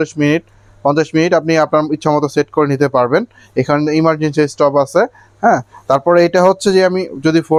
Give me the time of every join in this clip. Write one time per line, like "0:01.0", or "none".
none